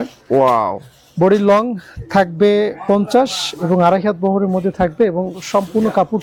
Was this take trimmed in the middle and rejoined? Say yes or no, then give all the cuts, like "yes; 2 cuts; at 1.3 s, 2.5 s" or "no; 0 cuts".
no; 0 cuts